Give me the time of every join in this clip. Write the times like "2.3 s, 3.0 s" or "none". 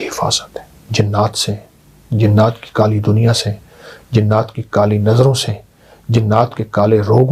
none